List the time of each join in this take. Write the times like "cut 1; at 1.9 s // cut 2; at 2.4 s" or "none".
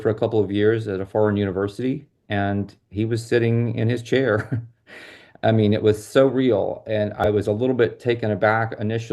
cut 1; at 7.2 s